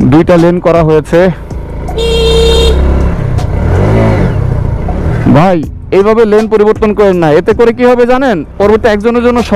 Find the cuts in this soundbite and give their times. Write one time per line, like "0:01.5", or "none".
none